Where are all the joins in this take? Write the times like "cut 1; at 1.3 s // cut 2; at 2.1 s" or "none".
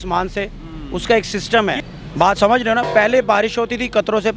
cut 1; at 1.8 s